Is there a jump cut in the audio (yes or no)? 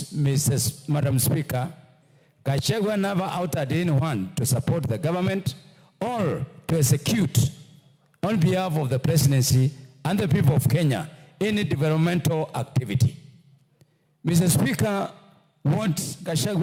no